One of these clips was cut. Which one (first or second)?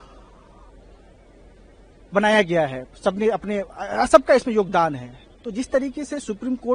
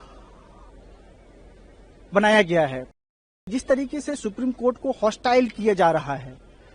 second